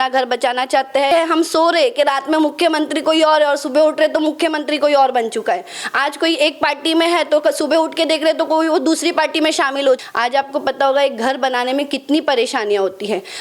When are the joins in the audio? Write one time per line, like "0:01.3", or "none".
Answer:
0:01.1
0:10.1

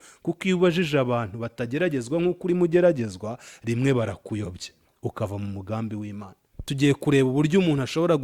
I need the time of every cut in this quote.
0:06.7

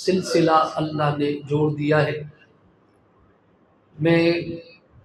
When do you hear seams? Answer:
none

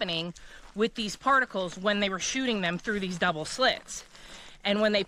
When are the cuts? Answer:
none

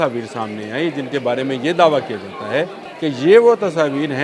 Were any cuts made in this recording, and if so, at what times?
0:02.8

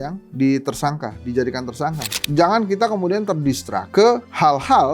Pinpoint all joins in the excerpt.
0:02.1

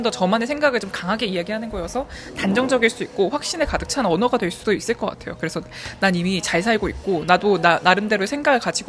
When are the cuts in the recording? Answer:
none

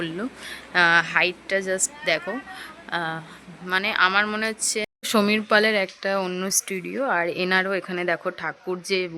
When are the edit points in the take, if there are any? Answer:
0:05.0

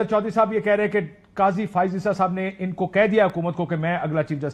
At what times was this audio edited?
none

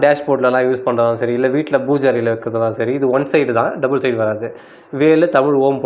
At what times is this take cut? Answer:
none

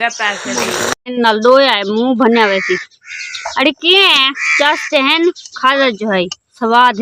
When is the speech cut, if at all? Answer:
0:00.9

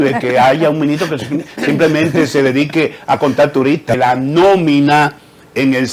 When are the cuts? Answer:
0:03.9

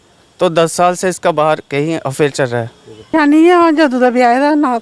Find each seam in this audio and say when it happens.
0:02.9

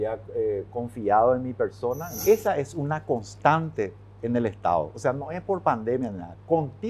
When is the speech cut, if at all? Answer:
0:02.1

